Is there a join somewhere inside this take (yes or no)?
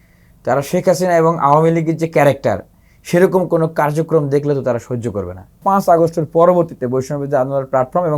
yes